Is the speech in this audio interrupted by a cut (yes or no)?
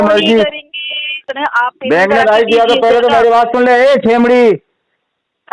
yes